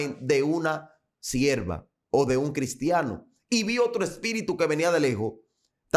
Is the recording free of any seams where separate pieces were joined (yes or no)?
yes